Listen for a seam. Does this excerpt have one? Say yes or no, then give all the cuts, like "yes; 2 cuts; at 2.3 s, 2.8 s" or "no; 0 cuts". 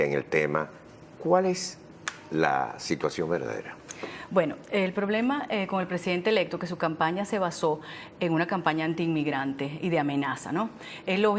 no; 0 cuts